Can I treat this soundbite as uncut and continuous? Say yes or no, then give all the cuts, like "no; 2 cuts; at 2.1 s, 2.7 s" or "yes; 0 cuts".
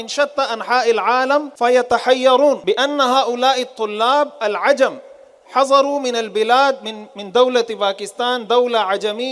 no; 2 cuts; at 1.5 s, 2.6 s